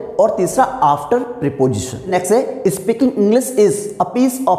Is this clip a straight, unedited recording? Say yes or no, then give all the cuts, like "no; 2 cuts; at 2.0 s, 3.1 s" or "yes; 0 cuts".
no; 1 cut; at 2.1 s